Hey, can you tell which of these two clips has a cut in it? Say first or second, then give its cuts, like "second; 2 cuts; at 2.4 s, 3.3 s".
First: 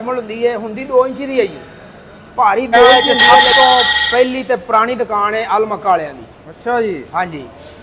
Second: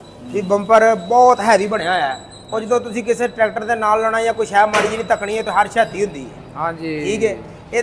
first; 1 cut; at 3.1 s